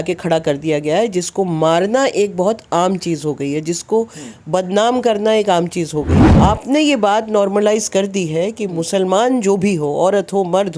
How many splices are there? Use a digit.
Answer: 1